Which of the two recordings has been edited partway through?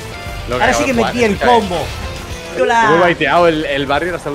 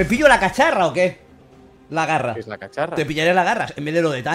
first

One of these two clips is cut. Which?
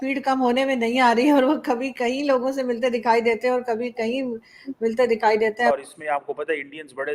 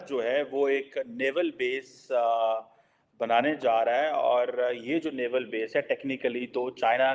first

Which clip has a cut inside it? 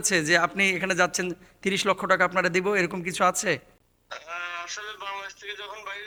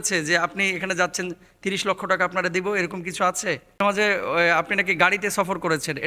second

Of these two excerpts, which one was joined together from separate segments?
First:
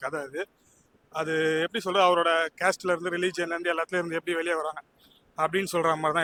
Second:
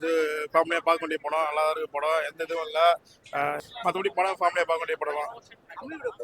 second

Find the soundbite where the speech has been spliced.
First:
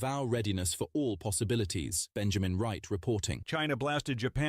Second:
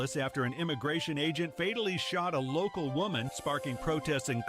first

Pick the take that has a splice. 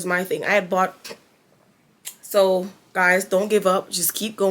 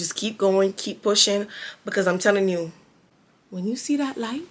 first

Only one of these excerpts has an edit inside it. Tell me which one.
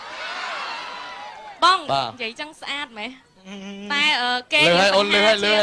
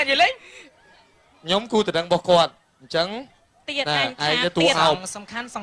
first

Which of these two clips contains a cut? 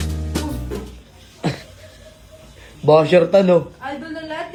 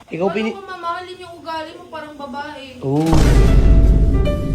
second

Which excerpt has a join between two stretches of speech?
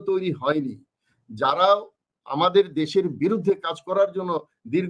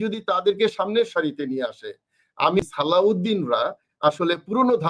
second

